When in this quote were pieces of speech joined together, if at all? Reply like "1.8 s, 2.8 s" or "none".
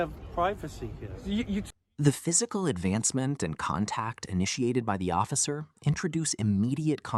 none